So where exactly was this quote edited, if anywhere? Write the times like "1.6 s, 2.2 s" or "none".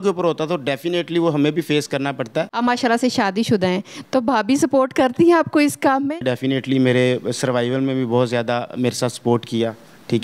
2.5 s, 6.1 s